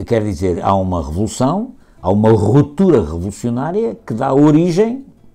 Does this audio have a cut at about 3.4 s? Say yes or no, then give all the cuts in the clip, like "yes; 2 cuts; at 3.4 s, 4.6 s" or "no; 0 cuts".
no; 0 cuts